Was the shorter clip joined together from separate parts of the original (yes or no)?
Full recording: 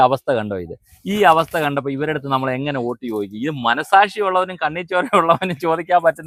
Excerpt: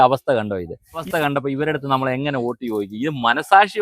yes